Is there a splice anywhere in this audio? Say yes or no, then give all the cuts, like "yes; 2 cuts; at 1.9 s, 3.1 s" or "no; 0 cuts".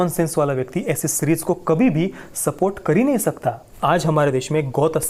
yes; 1 cut; at 3.7 s